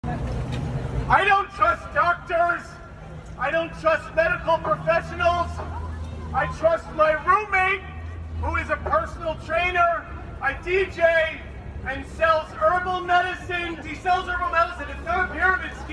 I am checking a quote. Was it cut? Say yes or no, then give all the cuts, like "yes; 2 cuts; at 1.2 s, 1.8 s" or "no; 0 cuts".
no; 0 cuts